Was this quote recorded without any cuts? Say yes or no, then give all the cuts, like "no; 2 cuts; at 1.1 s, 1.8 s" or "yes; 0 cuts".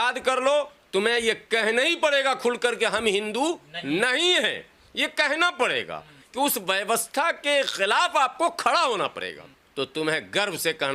no; 1 cut; at 9.6 s